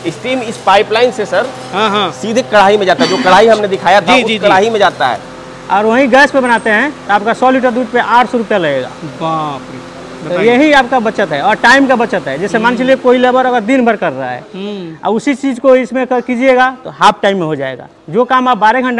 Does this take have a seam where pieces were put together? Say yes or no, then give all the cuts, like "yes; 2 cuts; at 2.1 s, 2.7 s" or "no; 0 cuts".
yes; 1 cut; at 5.2 s